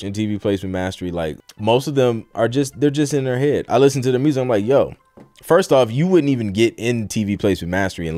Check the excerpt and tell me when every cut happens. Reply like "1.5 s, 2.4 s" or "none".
1.4 s